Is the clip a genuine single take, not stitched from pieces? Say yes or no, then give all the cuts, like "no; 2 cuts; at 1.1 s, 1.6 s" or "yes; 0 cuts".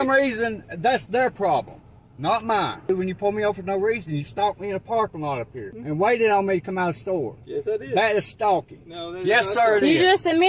no; 2 cuts; at 2.9 s, 5.7 s